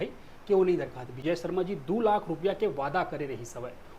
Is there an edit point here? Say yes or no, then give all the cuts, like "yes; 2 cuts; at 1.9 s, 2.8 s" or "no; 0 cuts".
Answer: yes; 1 cut; at 1.2 s